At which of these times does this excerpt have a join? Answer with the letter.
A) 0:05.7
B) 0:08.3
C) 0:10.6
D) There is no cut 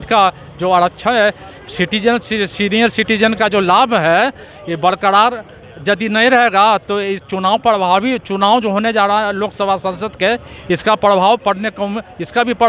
D